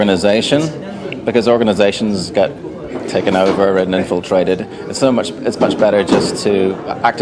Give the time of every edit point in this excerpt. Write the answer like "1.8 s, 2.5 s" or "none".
5.1 s